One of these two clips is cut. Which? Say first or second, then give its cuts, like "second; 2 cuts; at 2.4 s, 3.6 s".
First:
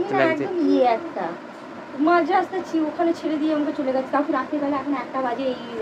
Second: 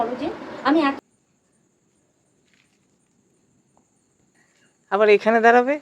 second; 1 cut; at 1.0 s